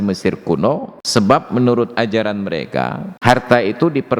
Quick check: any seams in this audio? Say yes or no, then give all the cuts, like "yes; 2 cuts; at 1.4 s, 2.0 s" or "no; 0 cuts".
yes; 2 cuts; at 0.9 s, 3.1 s